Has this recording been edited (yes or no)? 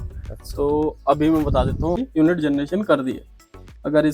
yes